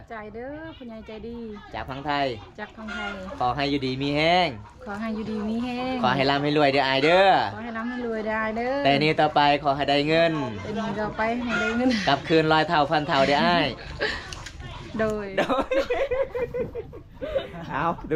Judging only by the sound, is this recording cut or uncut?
uncut